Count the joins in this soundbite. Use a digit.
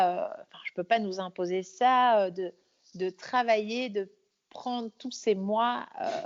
0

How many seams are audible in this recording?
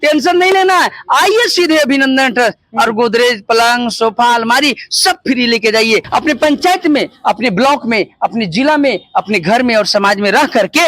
1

